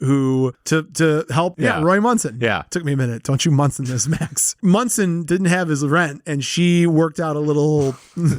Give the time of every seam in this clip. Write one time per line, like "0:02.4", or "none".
0:01.5
0:04.5